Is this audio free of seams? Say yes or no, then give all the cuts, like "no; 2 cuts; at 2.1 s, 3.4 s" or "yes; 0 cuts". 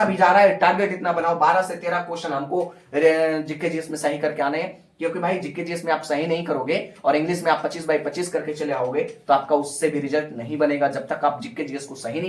yes; 0 cuts